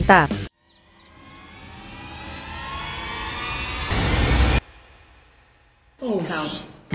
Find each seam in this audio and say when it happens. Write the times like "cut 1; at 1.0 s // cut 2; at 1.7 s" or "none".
cut 1; at 4.6 s